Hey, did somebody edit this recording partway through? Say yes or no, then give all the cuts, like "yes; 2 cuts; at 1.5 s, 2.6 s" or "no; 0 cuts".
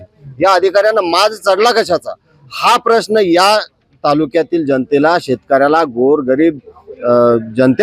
no; 0 cuts